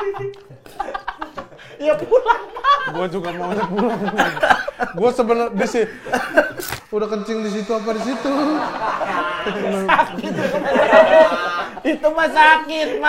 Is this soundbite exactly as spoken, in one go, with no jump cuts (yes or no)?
no